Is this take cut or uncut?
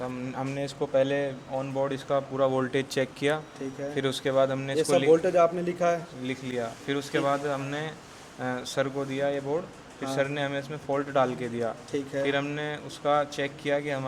uncut